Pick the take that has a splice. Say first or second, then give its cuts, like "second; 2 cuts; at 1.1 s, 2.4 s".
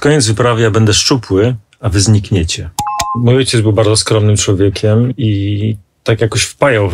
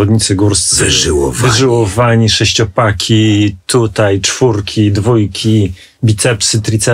first; 2 cuts; at 3.1 s, 5.1 s